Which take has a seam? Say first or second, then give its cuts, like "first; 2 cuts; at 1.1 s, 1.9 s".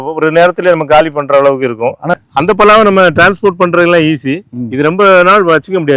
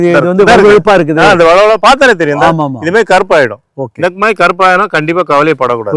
first; 1 cut; at 2.1 s